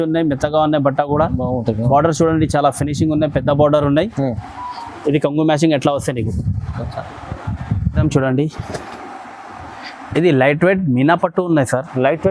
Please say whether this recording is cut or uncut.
cut